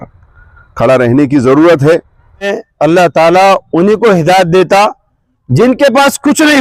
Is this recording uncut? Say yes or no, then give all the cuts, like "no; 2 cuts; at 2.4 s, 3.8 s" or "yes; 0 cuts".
no; 1 cut; at 2.6 s